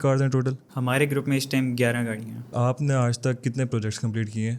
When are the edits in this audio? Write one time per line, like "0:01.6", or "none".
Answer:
0:02.5